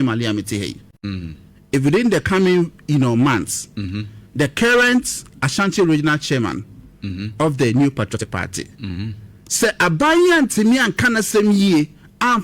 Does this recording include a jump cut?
yes; 1 cut; at 6.2 s

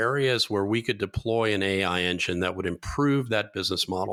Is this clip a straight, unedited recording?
yes; 0 cuts

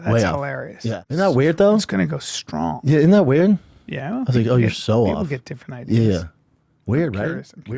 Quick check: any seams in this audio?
yes; 1 cut; at 1.0 s

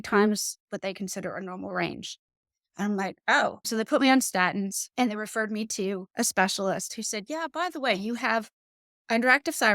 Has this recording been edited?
yes; 3 cuts; at 3.7 s, 4.8 s, 6.1 s

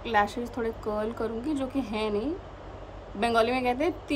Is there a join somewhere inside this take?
no; 0 cuts

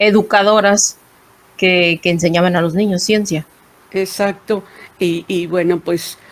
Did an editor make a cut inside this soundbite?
no; 0 cuts

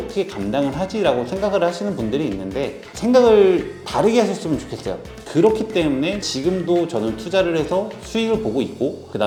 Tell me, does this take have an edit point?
no; 0 cuts

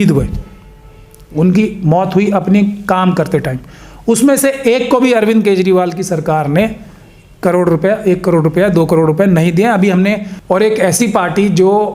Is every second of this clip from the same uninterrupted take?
no; 1 cut; at 10.3 s

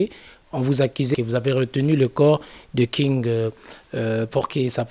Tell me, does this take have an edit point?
yes; 1 cut; at 1.1 s

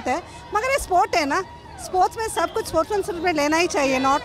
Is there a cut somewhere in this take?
no; 0 cuts

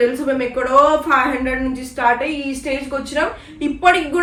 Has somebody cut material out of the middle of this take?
no; 0 cuts

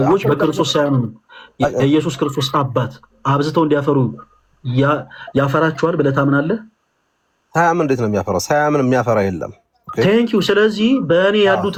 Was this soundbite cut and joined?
no; 0 cuts

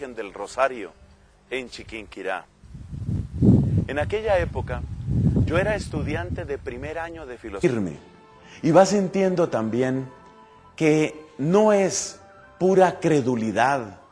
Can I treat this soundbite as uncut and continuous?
yes; 0 cuts

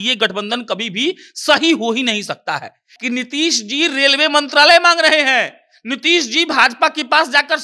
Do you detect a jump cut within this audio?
yes; 1 cut; at 2.9 s

